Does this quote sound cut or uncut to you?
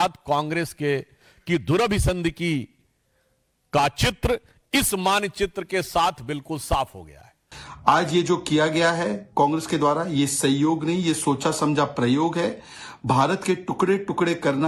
uncut